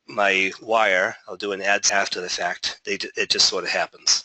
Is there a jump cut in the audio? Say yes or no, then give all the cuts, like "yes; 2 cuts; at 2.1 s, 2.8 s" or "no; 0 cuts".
yes; 1 cut; at 1.9 s